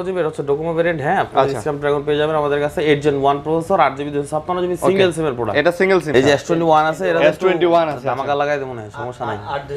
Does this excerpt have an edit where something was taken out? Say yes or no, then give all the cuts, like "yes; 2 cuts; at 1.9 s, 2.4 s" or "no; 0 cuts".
yes; 1 cut; at 6.1 s